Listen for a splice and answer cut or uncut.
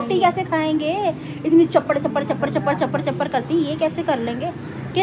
uncut